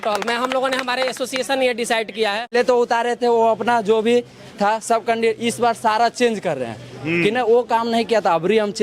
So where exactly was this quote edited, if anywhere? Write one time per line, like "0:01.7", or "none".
0:02.5